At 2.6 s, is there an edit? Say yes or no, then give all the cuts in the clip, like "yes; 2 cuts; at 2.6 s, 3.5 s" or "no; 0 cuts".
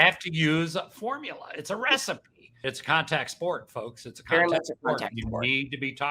yes; 1 cut; at 2.6 s